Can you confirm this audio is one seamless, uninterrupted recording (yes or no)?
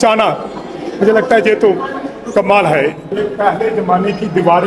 no